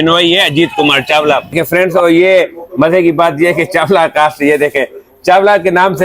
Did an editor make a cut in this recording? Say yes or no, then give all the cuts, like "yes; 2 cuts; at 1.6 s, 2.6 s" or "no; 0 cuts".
yes; 1 cut; at 1.5 s